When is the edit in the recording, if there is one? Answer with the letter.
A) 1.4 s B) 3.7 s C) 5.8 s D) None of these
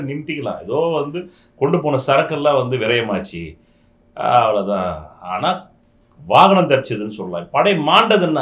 D